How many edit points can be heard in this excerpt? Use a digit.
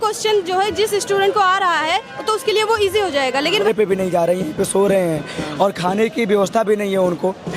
1